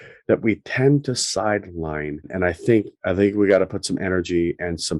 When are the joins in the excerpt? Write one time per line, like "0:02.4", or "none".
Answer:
0:02.3